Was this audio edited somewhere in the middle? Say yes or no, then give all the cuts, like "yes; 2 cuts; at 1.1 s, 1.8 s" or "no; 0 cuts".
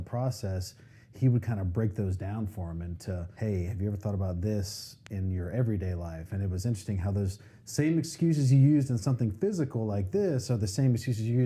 yes; 1 cut; at 3.3 s